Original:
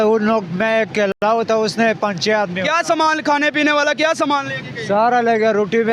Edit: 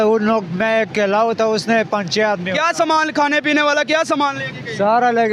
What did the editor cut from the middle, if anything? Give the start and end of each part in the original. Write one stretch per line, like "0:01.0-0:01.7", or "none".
0:01.1-0:01.2